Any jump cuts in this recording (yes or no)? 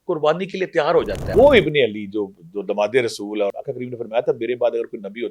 yes